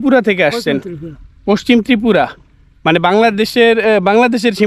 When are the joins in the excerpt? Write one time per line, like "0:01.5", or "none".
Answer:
none